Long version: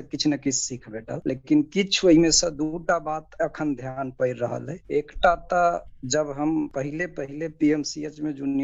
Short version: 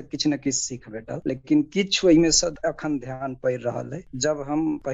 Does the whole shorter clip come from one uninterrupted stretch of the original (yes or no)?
no